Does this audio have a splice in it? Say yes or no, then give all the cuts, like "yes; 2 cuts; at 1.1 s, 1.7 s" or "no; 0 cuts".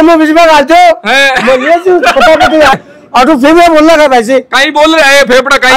yes; 1 cut; at 2.7 s